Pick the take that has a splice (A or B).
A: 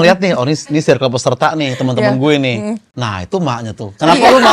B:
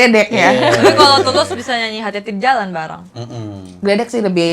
A